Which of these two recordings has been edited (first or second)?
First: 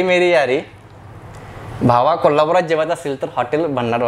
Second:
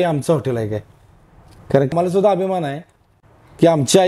second